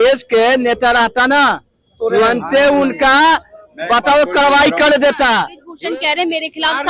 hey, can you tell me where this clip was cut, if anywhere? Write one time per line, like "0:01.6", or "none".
0:05.6